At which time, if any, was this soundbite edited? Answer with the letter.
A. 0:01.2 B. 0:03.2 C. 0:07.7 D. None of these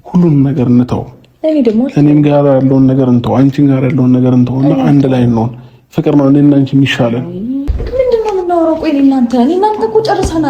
C